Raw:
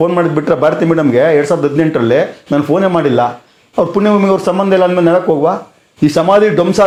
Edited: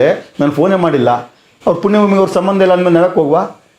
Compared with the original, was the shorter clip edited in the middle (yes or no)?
no